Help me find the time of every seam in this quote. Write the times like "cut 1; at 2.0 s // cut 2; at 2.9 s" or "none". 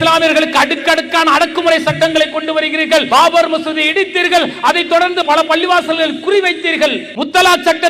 cut 1; at 3.1 s // cut 2; at 5.2 s // cut 3; at 7.1 s